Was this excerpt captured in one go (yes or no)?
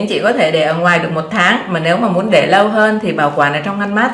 yes